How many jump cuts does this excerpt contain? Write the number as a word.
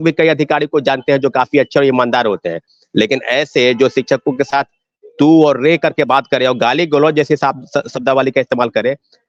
zero